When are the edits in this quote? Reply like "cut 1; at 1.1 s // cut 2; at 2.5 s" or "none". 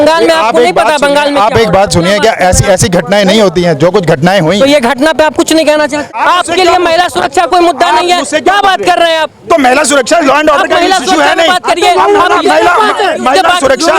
cut 1; at 6.1 s